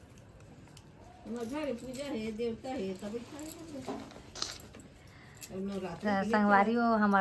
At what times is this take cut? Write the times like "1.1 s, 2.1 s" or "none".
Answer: 4.2 s